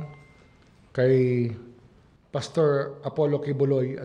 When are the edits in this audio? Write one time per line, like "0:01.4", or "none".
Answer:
none